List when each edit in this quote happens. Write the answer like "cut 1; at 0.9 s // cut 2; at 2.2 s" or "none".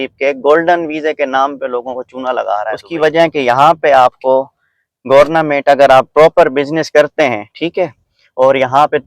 cut 1; at 2.8 s